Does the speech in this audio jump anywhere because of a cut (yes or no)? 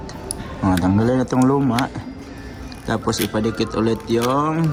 no